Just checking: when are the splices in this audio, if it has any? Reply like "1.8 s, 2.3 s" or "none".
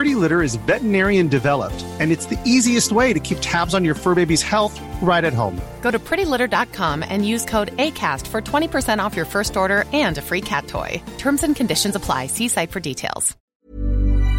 13.3 s